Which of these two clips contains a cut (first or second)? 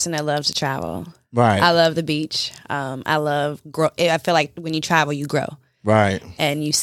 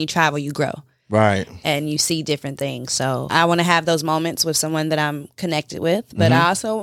second